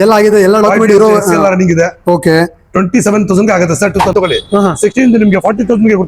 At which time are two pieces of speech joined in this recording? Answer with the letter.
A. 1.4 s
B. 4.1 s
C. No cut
B